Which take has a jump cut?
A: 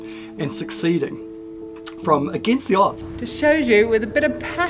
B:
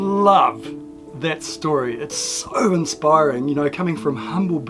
A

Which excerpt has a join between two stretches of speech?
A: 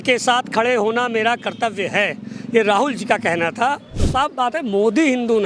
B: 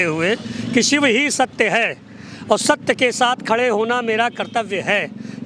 A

